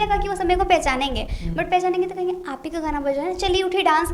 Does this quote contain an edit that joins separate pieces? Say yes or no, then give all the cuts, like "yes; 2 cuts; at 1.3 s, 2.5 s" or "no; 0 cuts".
no; 0 cuts